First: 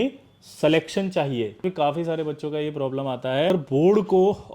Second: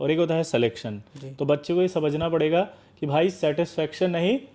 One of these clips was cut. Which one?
first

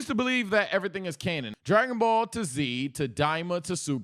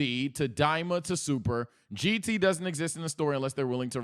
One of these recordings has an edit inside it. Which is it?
first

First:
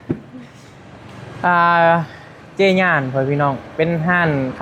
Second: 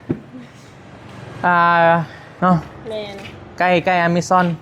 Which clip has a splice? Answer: second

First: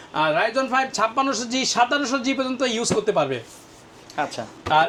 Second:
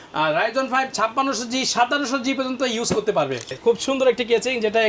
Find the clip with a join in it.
second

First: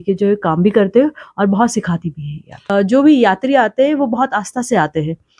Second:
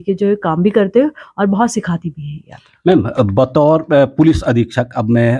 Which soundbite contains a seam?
first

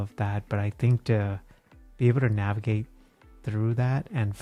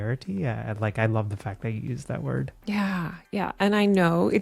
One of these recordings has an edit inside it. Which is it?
second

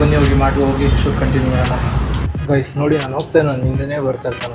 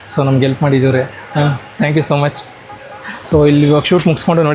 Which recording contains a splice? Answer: first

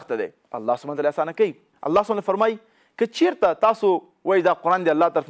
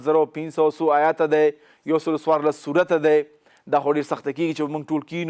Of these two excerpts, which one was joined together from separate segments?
first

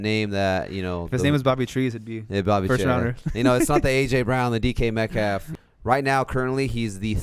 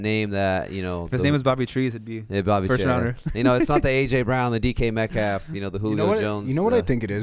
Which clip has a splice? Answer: first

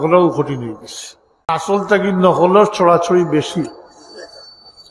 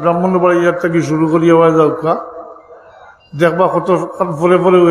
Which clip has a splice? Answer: first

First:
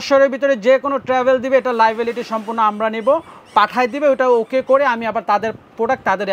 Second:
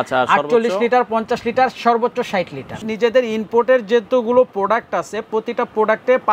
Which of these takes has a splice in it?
second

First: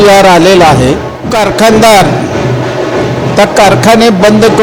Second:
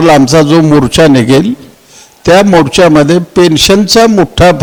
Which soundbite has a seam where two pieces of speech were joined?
first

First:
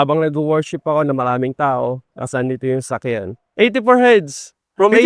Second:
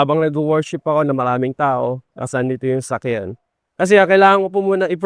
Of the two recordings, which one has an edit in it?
first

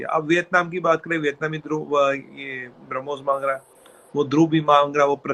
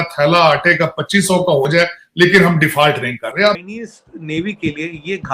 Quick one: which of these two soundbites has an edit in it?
second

